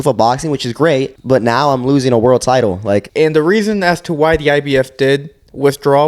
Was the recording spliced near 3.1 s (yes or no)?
yes